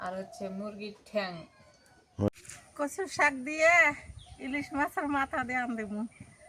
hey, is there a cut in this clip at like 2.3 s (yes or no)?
yes